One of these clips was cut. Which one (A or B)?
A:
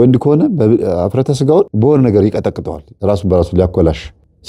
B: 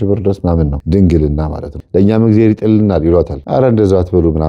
B